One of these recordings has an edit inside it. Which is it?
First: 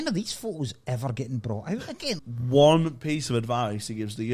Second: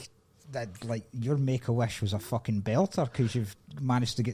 first; 1 cut; at 2.3 s

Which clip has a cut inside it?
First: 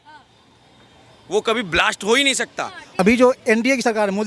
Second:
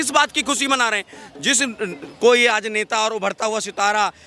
first; 1 cut; at 3.0 s

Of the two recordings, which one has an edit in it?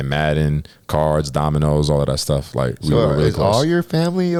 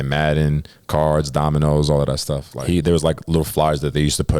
second; 1 cut; at 2.5 s

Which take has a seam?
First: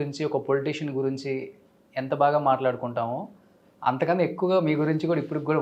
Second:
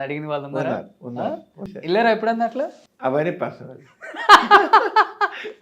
second; 2 cuts; at 1.7 s, 2.8 s

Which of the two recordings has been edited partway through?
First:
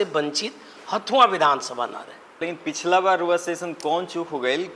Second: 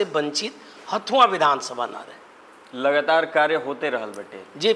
first; 1 cut; at 2.5 s

